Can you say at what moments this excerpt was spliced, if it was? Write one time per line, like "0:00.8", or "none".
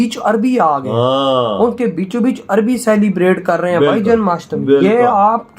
none